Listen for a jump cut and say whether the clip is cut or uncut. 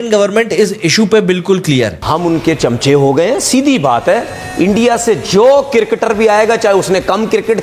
cut